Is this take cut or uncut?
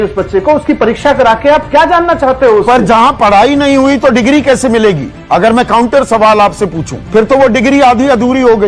uncut